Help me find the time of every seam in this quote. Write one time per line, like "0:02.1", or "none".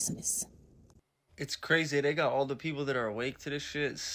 0:01.5